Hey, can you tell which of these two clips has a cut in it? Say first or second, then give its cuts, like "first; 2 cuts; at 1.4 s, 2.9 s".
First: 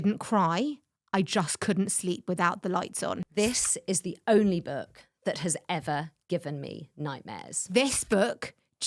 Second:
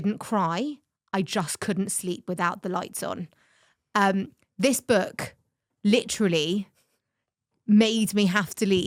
first; 2 cuts; at 3.2 s, 7.5 s